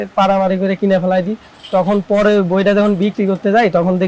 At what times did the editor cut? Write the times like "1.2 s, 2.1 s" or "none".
none